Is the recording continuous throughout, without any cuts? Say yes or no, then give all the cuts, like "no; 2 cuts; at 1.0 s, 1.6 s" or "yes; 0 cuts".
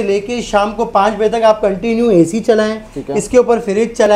yes; 0 cuts